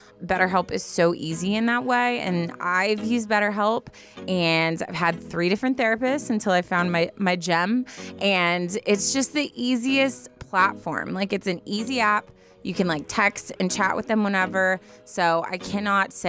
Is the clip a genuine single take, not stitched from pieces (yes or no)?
yes